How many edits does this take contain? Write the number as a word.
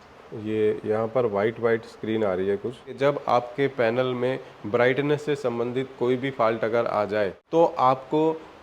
two